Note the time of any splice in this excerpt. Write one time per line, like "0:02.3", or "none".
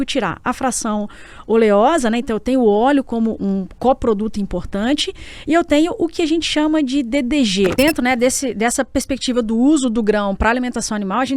0:07.7

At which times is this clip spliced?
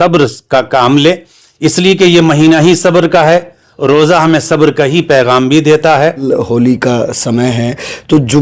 0:06.2

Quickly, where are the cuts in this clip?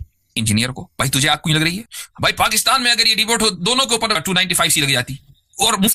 0:02.0
0:04.2

